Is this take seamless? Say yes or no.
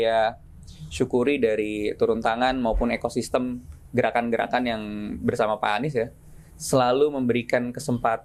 yes